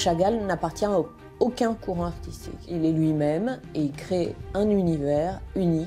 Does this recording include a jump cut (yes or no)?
yes